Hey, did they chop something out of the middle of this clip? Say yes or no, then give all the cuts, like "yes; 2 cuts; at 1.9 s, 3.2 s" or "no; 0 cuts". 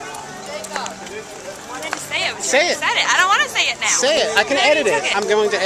no; 0 cuts